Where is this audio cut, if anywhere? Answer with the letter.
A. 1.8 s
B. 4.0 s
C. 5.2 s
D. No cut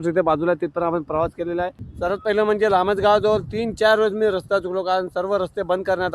A